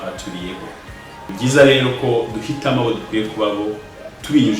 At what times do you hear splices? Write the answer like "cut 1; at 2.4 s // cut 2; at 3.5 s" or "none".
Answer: cut 1; at 1.3 s

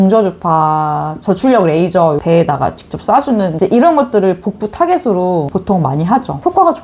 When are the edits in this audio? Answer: cut 1; at 2.2 s // cut 2; at 3.6 s

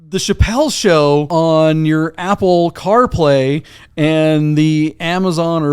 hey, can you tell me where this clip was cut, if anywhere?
cut 1; at 1.3 s

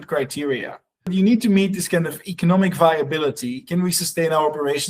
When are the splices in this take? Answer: cut 1; at 1.1 s

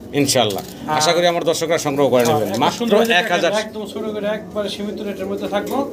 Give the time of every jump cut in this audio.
cut 1; at 3.5 s

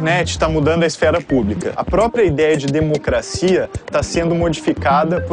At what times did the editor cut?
cut 1; at 1.7 s

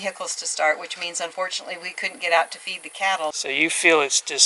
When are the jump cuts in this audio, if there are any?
cut 1; at 3.3 s

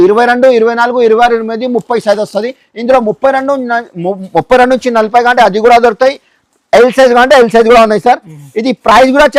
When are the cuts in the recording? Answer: none

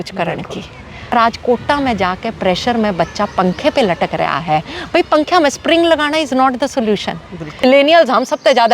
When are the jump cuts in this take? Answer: cut 1; at 1.1 s // cut 2; at 7.6 s

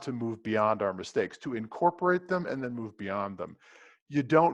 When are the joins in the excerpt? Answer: none

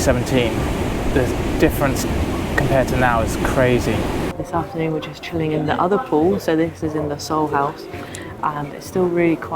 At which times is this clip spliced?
cut 1; at 4.3 s

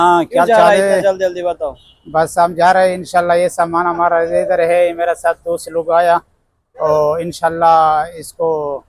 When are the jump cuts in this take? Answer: none

